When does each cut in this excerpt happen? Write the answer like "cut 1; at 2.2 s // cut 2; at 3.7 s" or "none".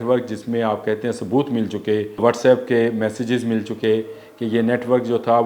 cut 1; at 2.2 s